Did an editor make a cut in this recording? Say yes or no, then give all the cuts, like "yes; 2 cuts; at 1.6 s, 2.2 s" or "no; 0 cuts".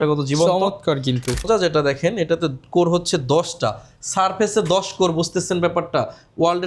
yes; 1 cut; at 1.5 s